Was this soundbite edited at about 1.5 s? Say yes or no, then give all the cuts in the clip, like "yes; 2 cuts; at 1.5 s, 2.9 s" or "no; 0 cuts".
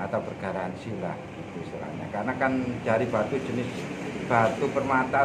no; 0 cuts